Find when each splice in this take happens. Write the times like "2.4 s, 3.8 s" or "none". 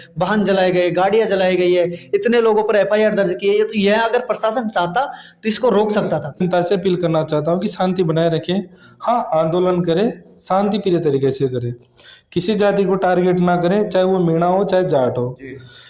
6.4 s